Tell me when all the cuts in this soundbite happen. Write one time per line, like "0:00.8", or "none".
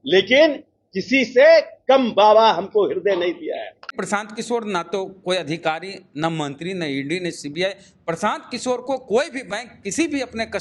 0:03.9